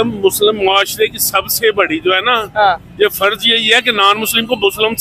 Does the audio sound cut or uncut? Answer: uncut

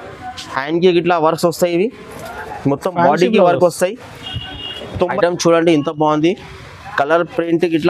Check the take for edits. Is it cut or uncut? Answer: cut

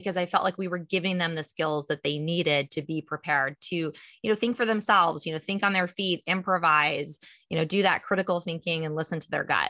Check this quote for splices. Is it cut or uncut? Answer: uncut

